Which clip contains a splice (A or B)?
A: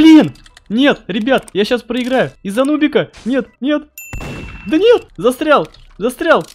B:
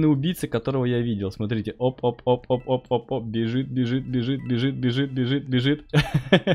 A